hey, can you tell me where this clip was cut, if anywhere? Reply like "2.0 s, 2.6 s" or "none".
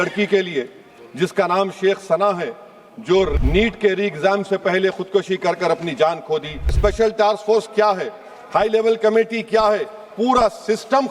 3.3 s, 6.8 s